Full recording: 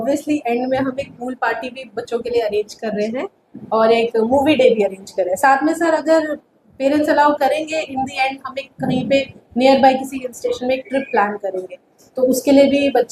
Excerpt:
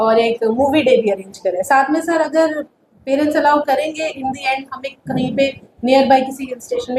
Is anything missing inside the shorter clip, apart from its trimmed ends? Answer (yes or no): no